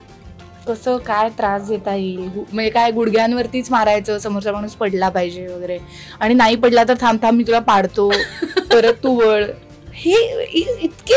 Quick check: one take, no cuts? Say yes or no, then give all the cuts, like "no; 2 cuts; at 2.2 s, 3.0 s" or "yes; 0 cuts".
yes; 0 cuts